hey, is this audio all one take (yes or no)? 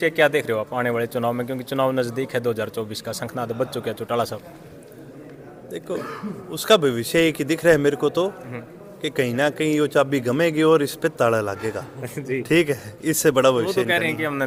yes